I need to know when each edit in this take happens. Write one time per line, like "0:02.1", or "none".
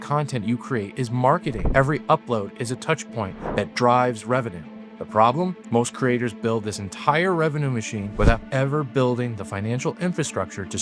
0:01.6
0:08.0